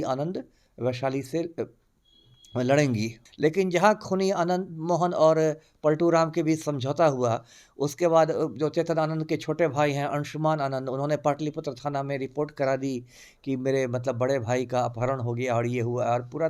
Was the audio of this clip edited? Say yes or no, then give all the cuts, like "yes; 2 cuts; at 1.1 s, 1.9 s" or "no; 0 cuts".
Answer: yes; 1 cut; at 3.2 s